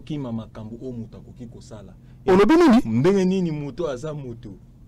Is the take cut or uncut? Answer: uncut